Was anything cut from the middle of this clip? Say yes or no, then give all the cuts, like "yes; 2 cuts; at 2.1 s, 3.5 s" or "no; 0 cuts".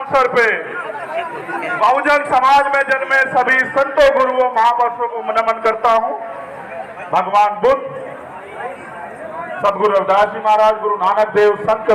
no; 0 cuts